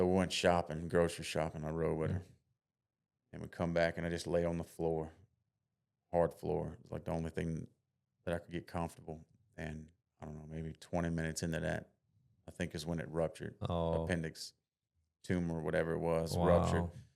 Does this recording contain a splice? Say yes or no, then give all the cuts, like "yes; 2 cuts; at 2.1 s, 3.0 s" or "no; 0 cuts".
no; 0 cuts